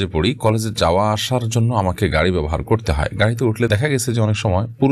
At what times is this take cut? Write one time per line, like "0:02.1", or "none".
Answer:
0:03.7